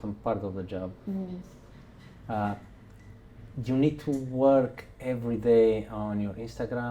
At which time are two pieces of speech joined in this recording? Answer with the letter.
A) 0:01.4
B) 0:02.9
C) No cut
C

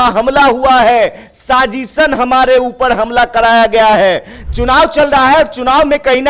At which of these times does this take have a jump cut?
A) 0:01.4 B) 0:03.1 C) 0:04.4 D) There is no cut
C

